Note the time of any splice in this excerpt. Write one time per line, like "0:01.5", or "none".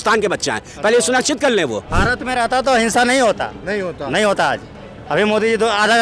0:02.0